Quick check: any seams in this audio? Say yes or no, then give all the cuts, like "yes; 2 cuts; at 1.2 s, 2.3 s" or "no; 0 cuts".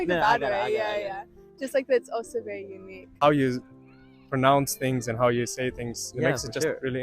yes; 1 cut; at 3.1 s